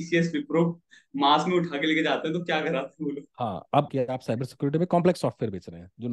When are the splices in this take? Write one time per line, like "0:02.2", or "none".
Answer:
0:03.9